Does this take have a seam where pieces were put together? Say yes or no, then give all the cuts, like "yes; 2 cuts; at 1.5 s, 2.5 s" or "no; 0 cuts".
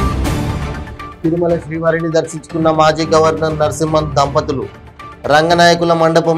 no; 0 cuts